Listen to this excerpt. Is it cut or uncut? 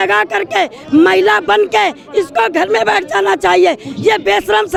uncut